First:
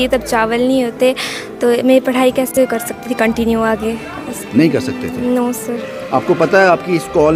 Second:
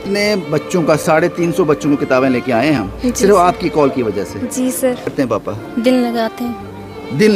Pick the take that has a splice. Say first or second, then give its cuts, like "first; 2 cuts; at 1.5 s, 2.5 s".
second; 1 cut; at 5.1 s